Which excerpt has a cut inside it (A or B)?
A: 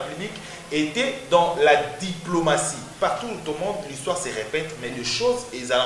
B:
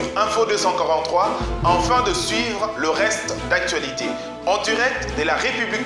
A